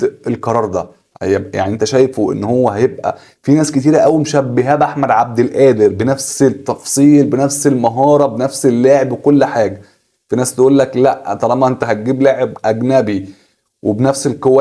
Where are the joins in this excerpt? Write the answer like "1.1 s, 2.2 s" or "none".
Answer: none